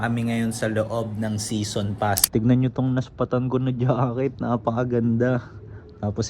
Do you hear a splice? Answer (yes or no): yes